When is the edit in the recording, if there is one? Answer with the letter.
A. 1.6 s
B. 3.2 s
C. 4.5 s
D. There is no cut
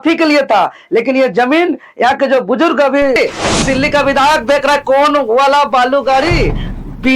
B